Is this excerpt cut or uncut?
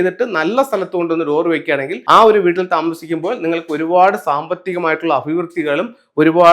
cut